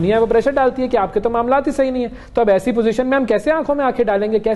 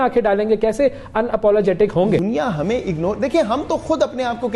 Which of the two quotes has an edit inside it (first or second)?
second